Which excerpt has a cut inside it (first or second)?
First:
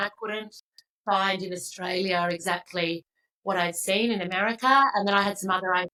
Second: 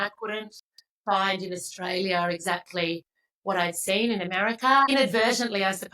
second